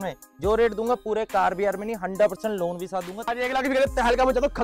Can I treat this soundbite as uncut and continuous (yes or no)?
no